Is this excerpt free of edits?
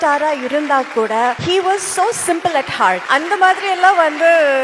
no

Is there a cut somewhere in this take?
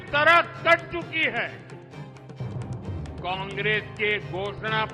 yes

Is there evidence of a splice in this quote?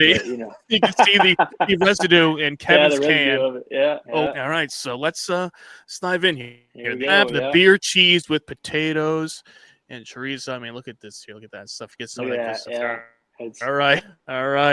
yes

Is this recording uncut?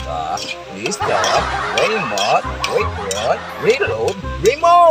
yes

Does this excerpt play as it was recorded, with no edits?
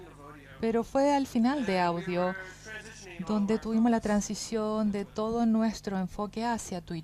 no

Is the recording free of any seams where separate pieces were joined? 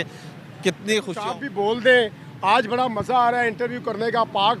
no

